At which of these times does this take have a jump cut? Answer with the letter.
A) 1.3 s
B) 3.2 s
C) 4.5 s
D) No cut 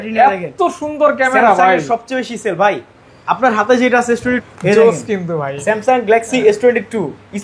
C